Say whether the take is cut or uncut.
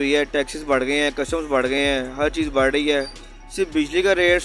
uncut